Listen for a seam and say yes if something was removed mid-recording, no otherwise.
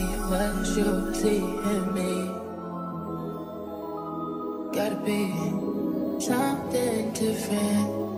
no